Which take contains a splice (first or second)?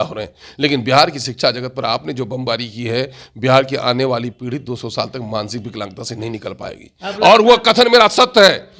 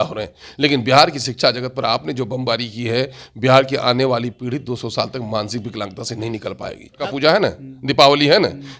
second